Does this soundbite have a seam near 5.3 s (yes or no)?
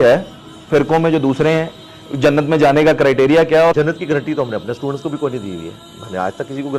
no